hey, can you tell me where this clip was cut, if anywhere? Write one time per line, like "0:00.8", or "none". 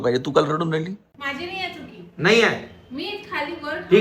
0:01.1